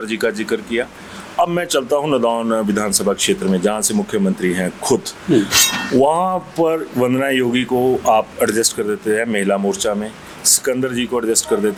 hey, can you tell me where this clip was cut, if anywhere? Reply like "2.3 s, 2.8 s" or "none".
none